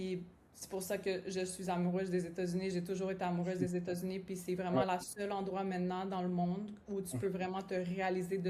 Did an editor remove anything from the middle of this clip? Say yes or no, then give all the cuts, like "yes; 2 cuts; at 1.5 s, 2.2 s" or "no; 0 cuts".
no; 0 cuts